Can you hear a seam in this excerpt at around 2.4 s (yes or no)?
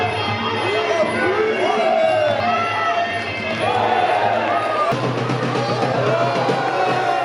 yes